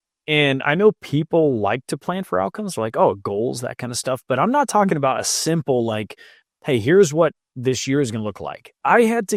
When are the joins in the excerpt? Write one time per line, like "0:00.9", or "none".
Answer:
none